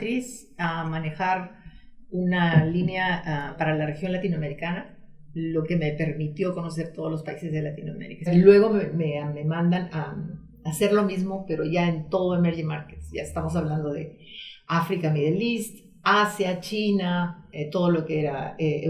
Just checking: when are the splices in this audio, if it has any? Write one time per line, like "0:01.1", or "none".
0:08.3